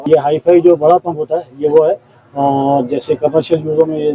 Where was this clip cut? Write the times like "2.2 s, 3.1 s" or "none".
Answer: none

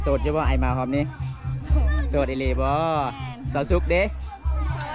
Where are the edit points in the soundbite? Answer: none

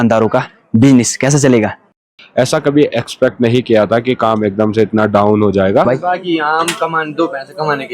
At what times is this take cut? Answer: 2.0 s, 5.9 s

